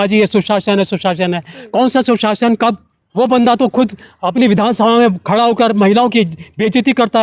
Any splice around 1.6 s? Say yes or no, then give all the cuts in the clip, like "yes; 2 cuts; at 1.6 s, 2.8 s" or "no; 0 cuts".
no; 1 cut; at 2.9 s